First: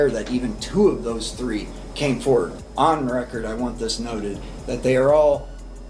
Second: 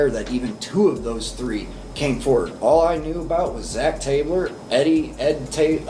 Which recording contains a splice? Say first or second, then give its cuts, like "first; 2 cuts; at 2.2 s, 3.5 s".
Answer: first; 1 cut; at 2.5 s